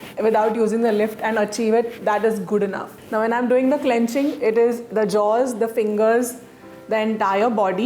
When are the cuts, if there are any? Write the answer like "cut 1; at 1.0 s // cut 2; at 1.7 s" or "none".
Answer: cut 1; at 2.9 s